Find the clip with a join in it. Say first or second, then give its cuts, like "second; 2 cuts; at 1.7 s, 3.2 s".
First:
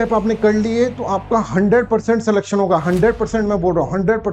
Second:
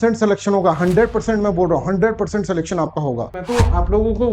second; 1 cut; at 3.4 s